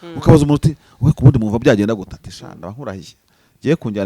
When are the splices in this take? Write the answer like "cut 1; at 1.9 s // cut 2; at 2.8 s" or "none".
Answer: none